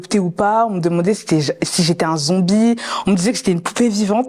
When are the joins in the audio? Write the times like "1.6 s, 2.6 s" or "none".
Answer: none